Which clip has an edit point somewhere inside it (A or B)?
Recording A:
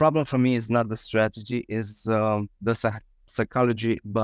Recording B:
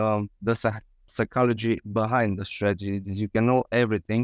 B